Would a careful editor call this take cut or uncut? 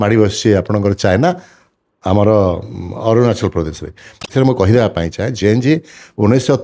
cut